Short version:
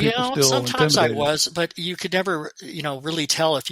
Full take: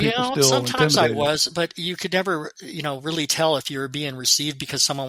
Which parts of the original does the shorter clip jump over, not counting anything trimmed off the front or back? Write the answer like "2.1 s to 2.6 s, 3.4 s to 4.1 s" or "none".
none